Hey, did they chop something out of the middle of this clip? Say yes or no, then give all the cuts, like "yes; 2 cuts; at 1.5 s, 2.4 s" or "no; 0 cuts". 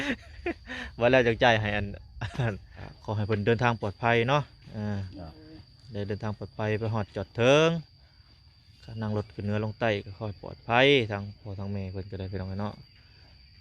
yes; 1 cut; at 2.9 s